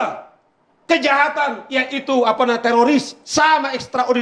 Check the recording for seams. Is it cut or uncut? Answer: uncut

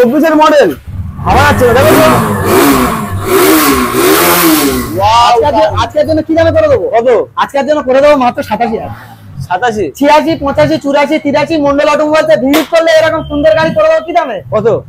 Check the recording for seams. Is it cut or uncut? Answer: uncut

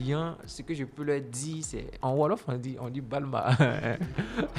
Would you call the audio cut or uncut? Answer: cut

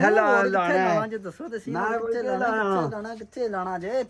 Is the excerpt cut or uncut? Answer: uncut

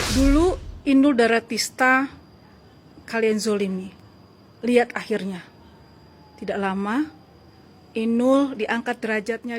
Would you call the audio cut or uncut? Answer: uncut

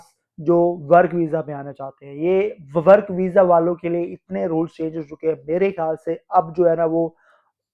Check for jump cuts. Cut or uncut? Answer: uncut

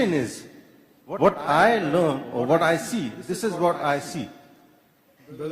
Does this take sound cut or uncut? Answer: cut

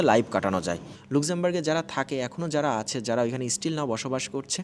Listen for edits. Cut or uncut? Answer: cut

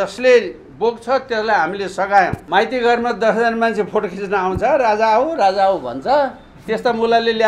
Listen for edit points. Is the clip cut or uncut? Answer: cut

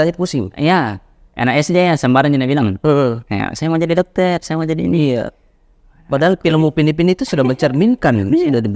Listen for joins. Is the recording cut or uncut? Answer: uncut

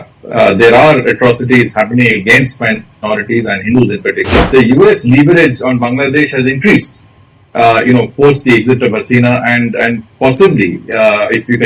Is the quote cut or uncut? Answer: cut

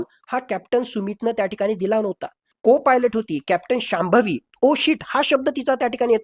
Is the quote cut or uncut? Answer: cut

